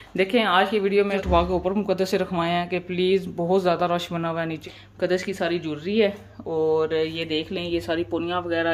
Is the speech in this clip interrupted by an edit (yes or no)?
yes